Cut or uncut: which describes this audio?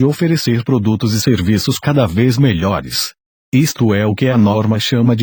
uncut